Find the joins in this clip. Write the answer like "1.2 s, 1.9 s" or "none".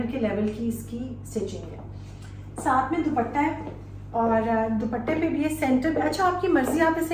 none